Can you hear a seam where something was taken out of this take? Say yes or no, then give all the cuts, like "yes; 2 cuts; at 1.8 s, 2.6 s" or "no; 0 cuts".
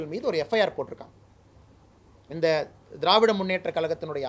no; 0 cuts